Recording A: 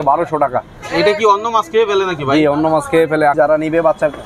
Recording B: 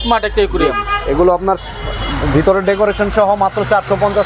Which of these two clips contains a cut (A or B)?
A